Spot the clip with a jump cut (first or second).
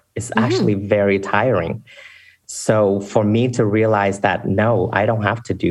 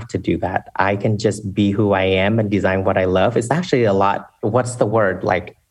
second